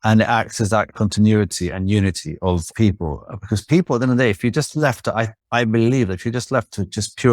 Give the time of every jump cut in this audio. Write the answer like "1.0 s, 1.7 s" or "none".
0.9 s, 2.7 s

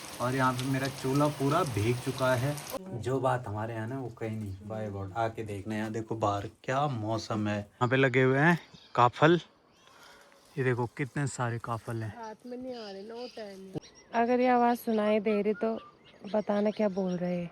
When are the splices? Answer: 2.7 s, 7.8 s, 13.8 s

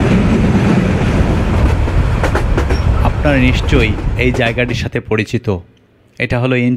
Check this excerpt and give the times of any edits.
1.4 s

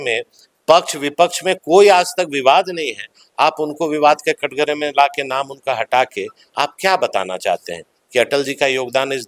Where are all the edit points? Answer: none

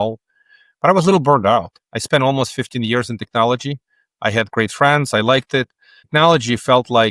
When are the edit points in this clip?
6.0 s

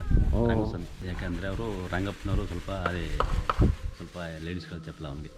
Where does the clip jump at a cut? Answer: 1.0 s

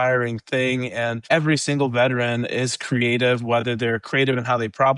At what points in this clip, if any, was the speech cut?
1.2 s

